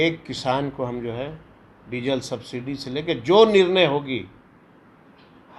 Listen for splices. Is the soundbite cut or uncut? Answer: uncut